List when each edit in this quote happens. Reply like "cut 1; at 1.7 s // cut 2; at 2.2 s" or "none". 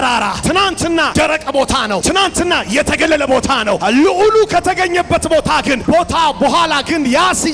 cut 1; at 0.8 s // cut 2; at 2.0 s // cut 3; at 3.8 s // cut 4; at 5.8 s